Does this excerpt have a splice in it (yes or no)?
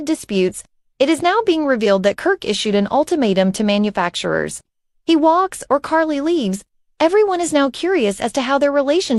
no